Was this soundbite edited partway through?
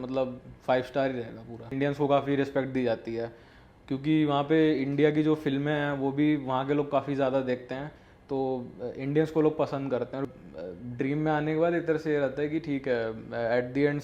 yes; 2 cuts; at 1.7 s, 10.3 s

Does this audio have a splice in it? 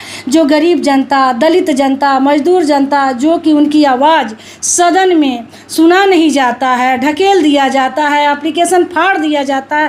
no; 0 cuts

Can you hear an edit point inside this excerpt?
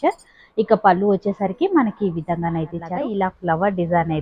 yes; 1 cut; at 3.0 s

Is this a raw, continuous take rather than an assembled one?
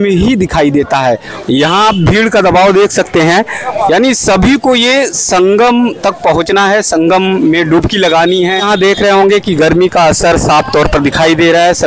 no; 2 cuts; at 1.3 s, 8.7 s

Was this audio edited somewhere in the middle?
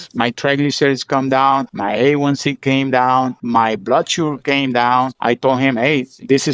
yes; 3 cuts; at 1.7 s, 3.4 s, 5.1 s

